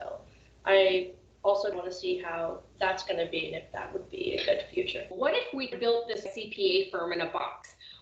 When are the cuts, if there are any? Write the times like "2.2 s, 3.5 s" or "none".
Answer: 5.1 s, 6.3 s